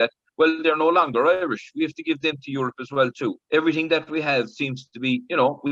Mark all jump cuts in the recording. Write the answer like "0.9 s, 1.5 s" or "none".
3.4 s